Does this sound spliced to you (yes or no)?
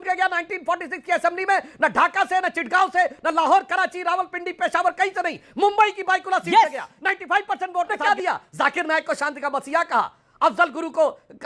yes